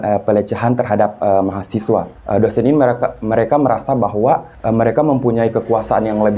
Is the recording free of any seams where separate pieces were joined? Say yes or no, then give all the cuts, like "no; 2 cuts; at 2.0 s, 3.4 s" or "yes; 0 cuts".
no; 2 cuts; at 2.2 s, 4.5 s